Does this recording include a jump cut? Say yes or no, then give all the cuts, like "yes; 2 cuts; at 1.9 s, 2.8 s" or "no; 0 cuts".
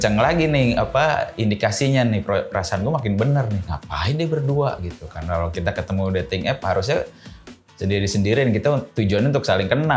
no; 0 cuts